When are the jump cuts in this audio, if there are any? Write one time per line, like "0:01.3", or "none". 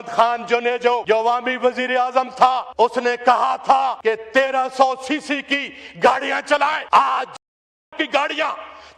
0:01.0
0:02.7
0:04.0
0:06.8